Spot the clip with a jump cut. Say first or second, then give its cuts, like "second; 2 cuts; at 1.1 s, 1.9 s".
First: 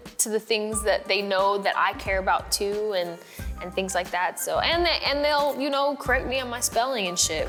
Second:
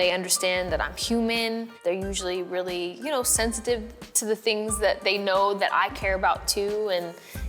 second; 1 cut; at 1.7 s